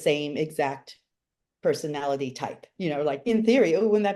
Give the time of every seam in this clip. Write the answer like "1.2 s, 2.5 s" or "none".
2.7 s